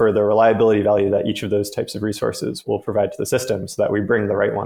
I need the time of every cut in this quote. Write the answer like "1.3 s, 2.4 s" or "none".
none